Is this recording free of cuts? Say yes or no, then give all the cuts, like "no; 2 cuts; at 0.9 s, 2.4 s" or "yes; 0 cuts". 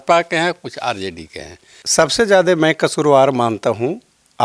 no; 1 cut; at 1.8 s